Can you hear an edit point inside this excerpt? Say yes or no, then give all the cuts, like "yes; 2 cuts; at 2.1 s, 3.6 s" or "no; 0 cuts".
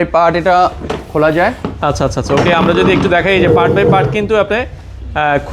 no; 0 cuts